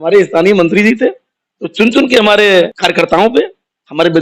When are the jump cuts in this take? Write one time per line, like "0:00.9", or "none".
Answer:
0:02.7

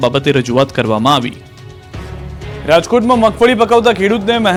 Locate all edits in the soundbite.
none

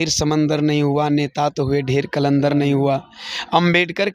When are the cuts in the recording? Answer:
none

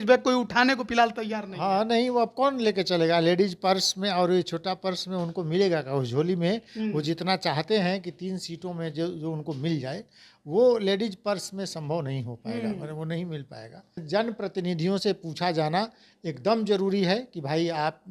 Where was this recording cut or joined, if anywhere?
0:14.0

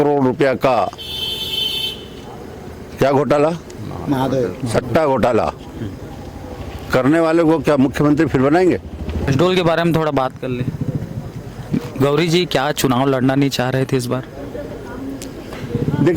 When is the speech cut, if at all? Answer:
0:09.3

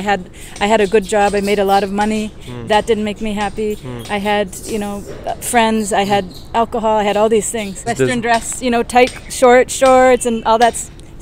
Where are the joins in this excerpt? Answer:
0:07.9

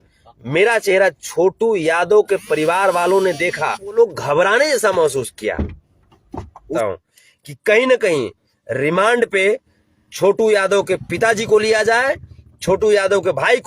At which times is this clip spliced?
0:04.0
0:06.7

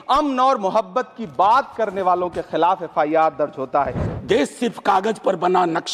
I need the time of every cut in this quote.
0:04.0

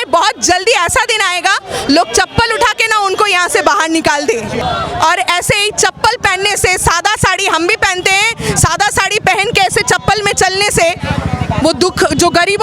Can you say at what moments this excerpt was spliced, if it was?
0:04.6

